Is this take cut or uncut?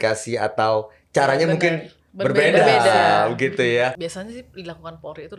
cut